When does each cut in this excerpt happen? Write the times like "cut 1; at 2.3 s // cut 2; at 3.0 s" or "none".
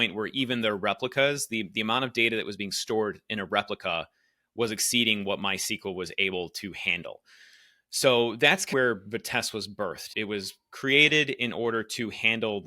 cut 1; at 10.1 s